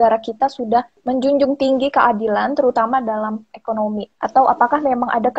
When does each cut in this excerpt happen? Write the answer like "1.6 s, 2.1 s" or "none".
1.0 s, 4.1 s

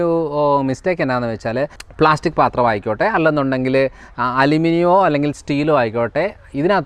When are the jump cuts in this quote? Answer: 1.8 s

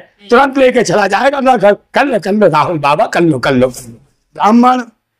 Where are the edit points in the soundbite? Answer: 3.8 s

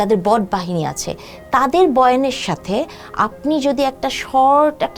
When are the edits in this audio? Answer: none

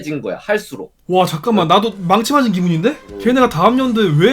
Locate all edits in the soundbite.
3.1 s

